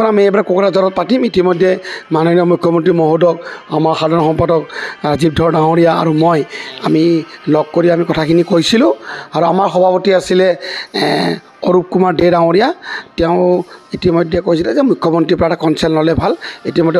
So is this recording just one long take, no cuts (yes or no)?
yes